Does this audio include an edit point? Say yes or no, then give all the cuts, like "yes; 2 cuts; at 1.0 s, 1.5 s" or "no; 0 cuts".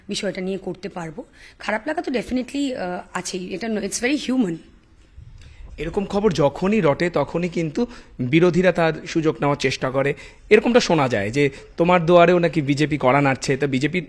no; 0 cuts